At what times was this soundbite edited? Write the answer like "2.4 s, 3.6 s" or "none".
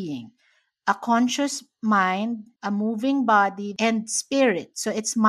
2.5 s, 3.7 s